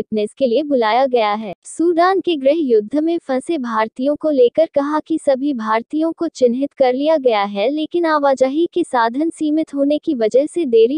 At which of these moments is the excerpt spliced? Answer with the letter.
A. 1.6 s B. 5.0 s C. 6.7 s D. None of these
A